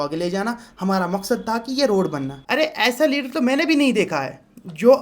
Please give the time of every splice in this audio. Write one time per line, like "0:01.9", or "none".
0:02.3